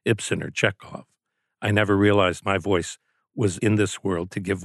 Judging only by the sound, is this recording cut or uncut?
cut